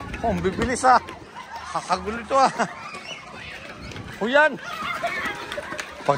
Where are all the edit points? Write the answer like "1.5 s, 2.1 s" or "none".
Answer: none